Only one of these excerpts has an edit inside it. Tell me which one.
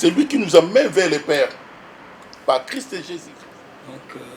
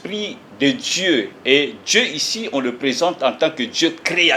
first; 1 cut; at 3.0 s

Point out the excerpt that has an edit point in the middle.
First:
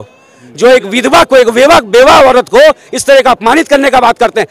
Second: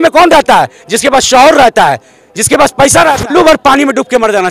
second; 1 cut; at 3.2 s

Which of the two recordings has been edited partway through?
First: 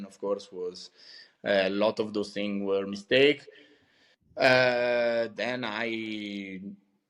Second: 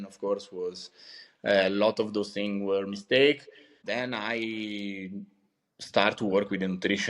second; 1 cut; at 3.9 s

